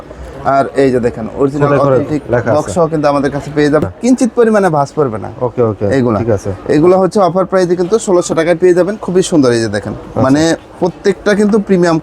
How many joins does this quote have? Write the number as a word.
one